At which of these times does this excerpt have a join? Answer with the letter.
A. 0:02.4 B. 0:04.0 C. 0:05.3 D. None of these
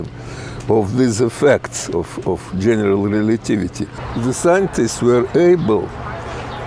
B